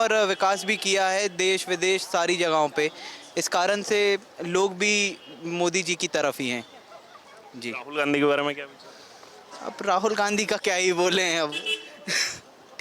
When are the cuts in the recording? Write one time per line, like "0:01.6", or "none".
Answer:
none